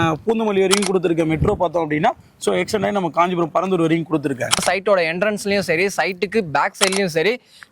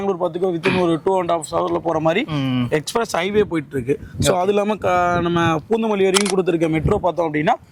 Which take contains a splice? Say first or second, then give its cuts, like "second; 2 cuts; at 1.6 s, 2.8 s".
first; 1 cut; at 4.6 s